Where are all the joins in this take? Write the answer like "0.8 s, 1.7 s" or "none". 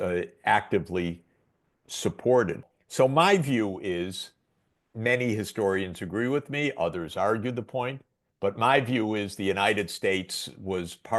2.8 s